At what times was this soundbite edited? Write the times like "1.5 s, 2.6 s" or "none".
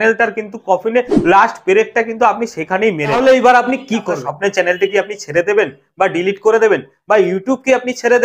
3.1 s, 4.1 s